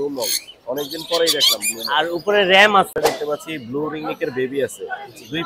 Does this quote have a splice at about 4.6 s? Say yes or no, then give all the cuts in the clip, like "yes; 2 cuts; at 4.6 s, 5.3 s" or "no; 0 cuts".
no; 1 cut; at 3.0 s